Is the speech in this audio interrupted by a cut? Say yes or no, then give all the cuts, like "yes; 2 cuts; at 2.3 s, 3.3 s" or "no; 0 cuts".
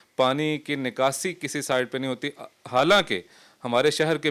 no; 0 cuts